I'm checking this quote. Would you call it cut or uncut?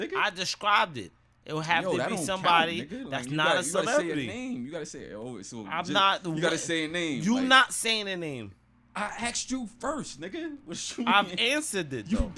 uncut